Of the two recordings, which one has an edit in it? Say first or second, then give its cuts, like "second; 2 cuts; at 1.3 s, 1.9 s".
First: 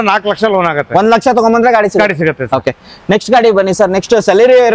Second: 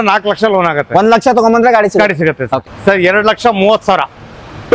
second; 1 cut; at 2.7 s